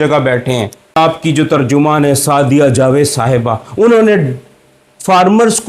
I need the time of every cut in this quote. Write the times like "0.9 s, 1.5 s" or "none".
1.0 s